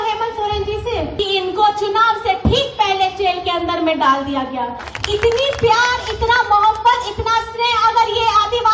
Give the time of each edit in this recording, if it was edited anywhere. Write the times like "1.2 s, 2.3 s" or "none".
1.1 s, 4.9 s